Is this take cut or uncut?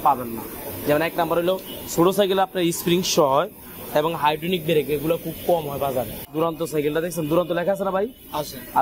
cut